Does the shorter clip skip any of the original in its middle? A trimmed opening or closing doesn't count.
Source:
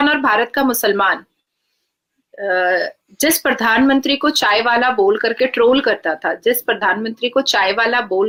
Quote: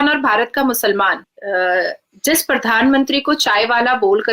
yes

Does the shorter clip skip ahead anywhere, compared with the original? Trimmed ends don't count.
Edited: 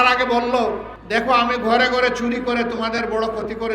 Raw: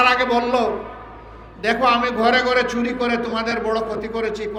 yes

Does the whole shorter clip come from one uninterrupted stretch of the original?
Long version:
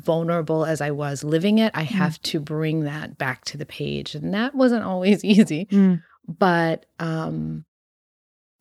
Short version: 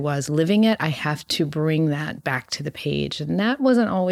yes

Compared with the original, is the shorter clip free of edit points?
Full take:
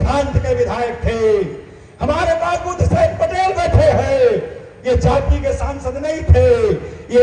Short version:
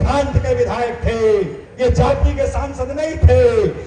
no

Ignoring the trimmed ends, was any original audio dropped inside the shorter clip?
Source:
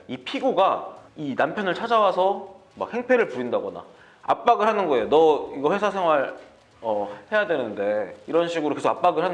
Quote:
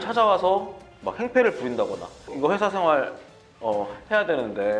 yes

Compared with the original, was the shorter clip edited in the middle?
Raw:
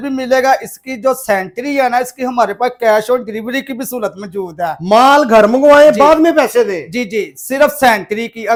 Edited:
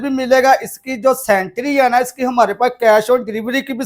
no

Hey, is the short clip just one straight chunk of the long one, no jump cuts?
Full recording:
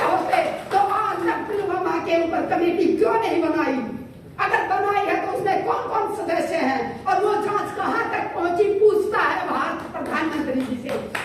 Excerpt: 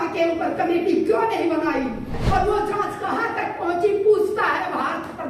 no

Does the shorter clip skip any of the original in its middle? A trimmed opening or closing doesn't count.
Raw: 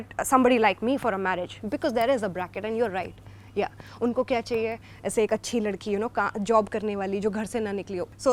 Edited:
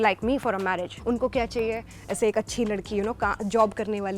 yes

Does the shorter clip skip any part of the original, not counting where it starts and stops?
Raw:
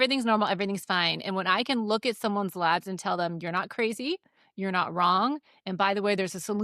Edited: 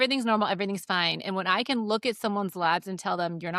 no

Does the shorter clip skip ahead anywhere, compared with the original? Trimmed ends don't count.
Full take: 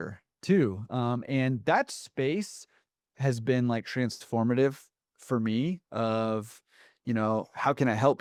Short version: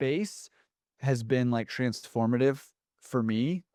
no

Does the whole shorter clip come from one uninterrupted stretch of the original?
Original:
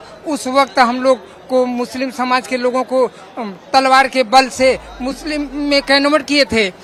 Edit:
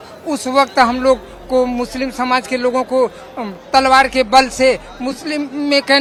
yes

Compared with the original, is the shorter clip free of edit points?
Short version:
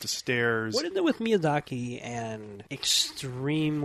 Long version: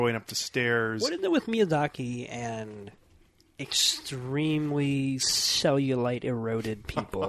no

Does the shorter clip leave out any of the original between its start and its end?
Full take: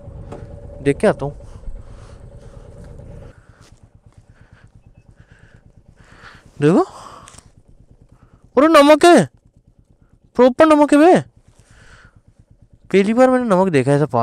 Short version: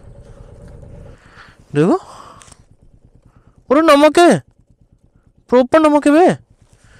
yes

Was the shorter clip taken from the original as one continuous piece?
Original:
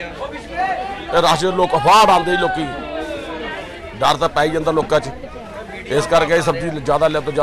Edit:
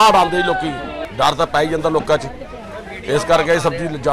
no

